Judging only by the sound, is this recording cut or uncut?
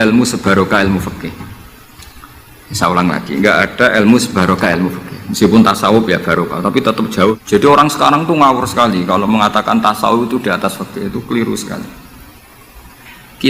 cut